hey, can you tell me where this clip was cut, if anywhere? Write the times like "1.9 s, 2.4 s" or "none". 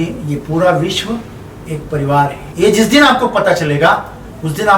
2.4 s